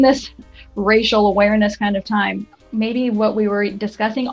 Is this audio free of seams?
no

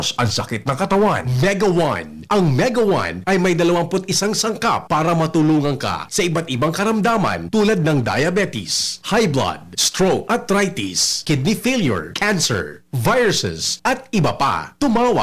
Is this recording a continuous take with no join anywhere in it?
no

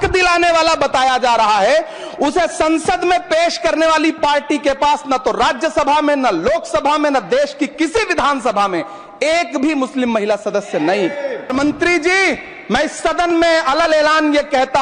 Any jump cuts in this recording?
yes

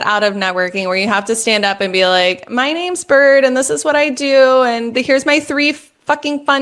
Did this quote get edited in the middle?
no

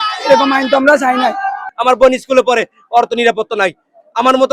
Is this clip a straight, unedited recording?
no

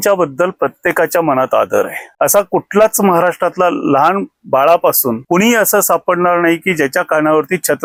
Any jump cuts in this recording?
no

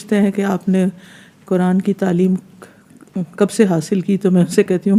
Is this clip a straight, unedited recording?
yes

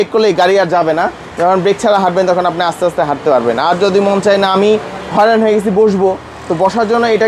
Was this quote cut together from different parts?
no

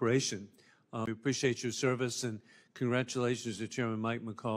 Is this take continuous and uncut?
yes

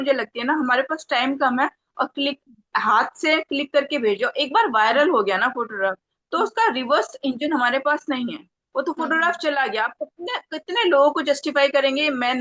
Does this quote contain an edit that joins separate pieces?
no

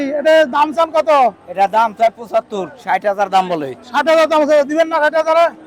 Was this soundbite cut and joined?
no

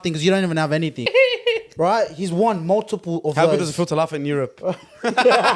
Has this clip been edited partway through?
yes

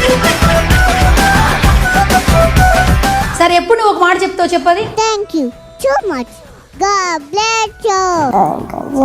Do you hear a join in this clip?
yes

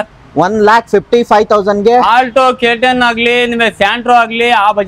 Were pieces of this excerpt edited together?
no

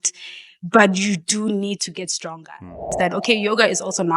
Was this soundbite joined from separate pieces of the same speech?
yes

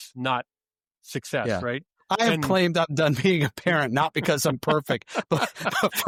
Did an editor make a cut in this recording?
no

